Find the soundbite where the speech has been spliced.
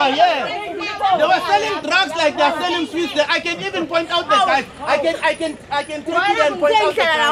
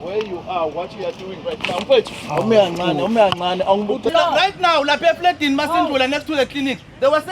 second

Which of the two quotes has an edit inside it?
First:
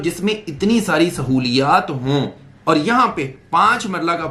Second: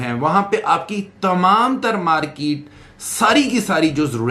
first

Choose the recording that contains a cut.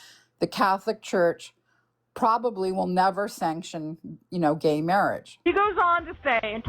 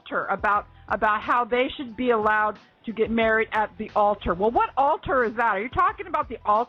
first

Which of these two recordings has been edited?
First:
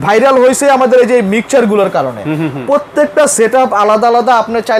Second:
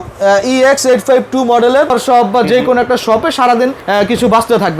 second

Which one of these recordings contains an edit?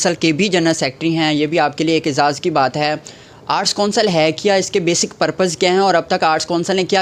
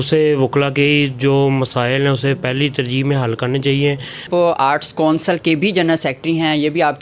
second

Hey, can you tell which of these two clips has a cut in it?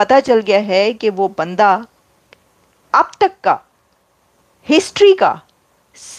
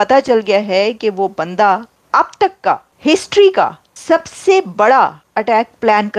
second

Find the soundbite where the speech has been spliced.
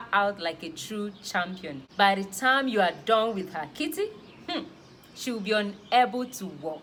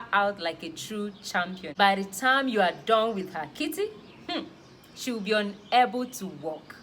second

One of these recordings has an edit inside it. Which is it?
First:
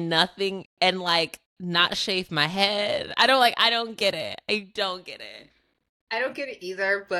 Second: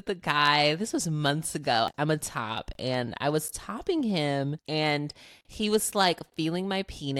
second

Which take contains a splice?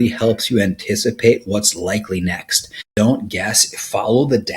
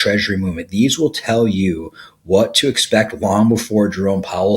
first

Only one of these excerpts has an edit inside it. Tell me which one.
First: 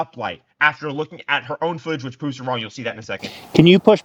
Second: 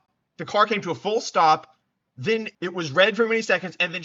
second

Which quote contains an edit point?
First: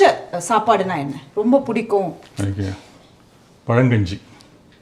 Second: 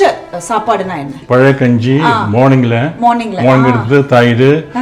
second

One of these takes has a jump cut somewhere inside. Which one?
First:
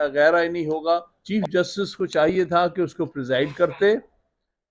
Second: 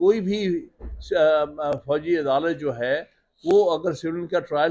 first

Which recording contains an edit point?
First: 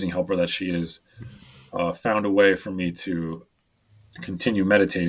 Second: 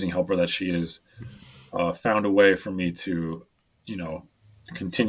first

